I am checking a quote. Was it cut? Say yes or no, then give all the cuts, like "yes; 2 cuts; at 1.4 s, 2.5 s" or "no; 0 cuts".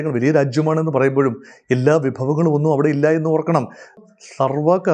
yes; 1 cut; at 4.0 s